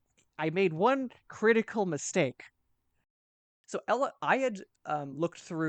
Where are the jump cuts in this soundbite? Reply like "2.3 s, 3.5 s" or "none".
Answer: 3.5 s